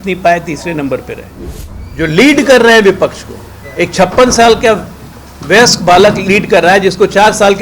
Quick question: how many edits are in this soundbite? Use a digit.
1